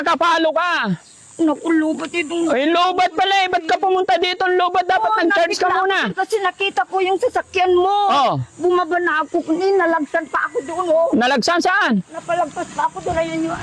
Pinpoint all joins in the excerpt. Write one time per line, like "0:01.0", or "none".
none